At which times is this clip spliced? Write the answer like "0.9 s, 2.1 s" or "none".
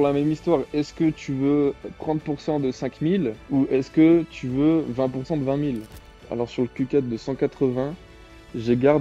6.1 s